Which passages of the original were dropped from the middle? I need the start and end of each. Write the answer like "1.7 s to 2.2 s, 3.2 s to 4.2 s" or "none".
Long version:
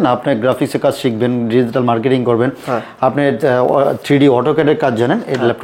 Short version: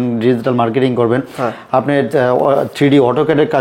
none